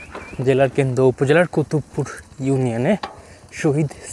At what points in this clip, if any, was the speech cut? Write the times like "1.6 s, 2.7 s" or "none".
none